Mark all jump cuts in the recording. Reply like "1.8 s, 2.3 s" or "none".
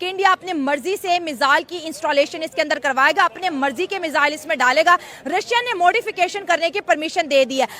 none